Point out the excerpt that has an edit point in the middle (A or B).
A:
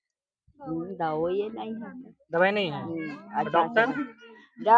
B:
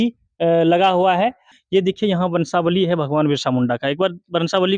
B